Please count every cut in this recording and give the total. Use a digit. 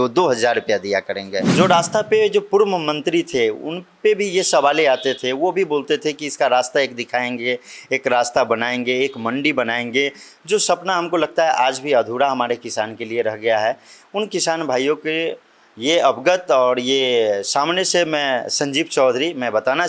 1